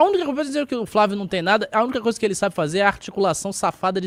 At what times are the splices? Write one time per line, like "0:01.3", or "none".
none

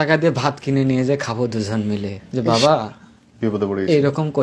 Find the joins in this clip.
0:02.2

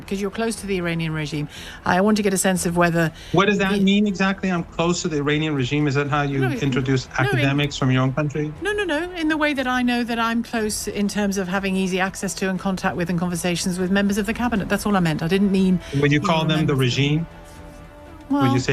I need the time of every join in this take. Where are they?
none

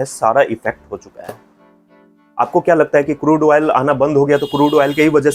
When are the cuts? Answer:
none

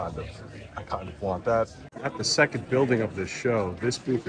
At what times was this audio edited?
0:01.9

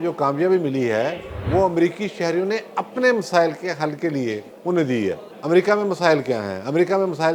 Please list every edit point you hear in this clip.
0:04.5
0:05.3

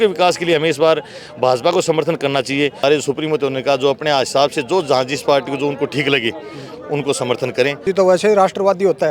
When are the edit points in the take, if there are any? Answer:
0:02.8
0:07.9

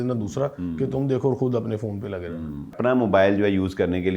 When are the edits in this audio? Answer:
0:02.7

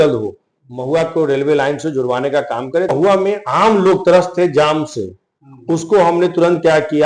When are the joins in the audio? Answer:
0:02.9

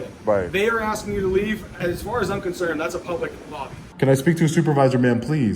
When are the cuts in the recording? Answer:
0:01.8
0:03.8

